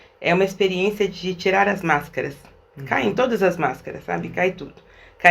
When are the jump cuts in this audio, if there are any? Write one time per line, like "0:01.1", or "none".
none